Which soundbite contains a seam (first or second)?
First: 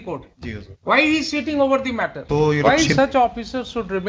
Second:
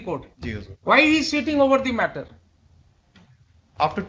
first